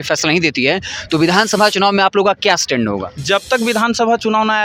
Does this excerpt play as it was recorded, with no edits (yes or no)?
yes